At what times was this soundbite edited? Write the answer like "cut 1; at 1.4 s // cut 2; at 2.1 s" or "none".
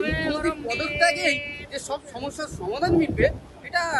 none